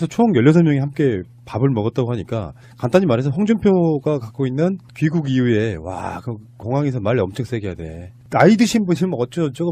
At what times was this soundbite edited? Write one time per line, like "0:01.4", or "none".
0:03.7